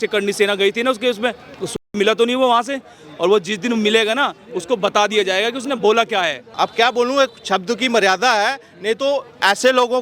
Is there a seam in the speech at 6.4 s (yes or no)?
yes